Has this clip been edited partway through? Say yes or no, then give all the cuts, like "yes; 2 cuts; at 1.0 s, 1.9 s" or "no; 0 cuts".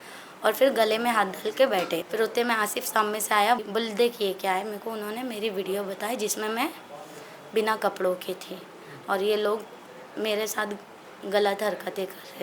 yes; 2 cuts; at 2.1 s, 3.6 s